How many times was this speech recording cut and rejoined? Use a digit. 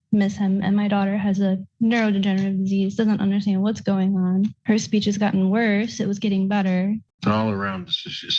1